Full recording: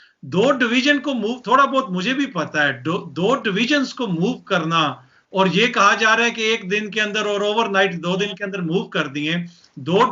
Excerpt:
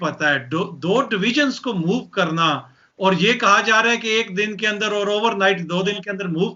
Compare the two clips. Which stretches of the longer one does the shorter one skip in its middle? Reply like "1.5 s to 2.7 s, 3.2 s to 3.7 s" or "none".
none